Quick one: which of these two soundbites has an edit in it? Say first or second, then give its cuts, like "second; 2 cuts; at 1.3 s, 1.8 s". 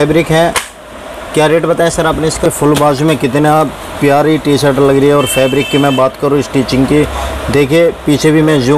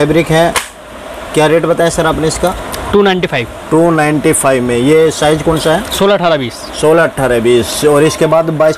first; 1 cut; at 2.5 s